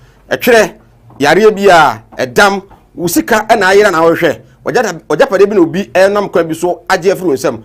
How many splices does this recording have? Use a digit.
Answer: 1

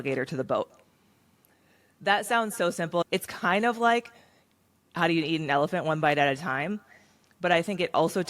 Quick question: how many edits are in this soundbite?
1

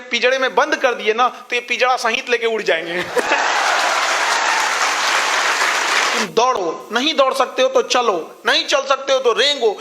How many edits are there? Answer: 1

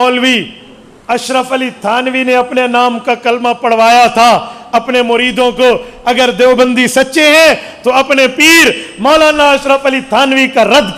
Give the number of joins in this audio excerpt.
0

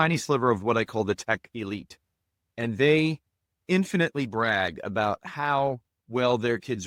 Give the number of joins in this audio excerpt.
0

